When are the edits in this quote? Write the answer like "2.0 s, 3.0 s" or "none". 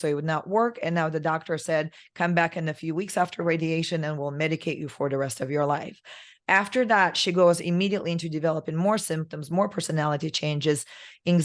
none